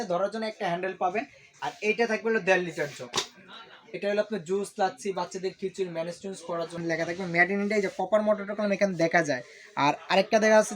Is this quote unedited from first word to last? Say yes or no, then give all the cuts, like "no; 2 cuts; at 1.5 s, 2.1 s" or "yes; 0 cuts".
no; 2 cuts; at 1.4 s, 6.8 s